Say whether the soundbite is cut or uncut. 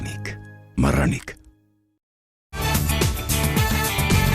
cut